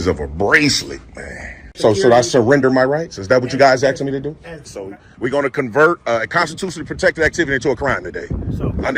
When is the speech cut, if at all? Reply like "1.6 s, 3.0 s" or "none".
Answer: 1.7 s, 4.6 s

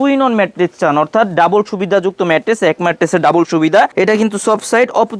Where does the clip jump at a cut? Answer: 3.9 s

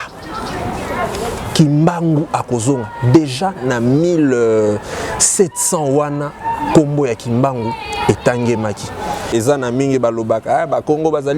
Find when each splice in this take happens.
9.2 s

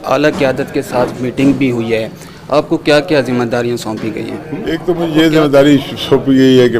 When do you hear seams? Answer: none

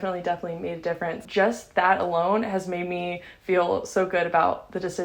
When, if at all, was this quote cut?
1.2 s

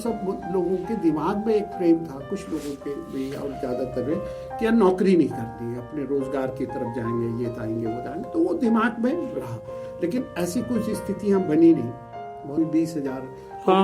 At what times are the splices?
12.6 s

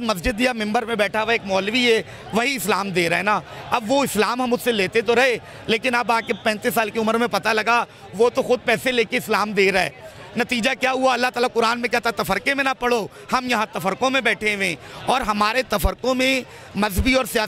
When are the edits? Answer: none

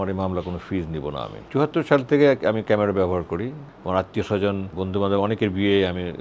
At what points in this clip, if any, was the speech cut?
1.4 s, 3.7 s, 4.7 s

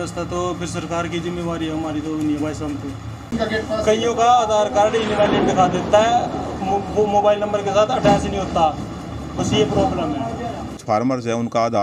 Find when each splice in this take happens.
3.3 s, 10.8 s

